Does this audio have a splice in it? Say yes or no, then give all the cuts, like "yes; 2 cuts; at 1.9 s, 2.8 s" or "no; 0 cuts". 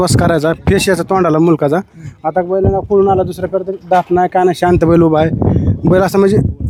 no; 0 cuts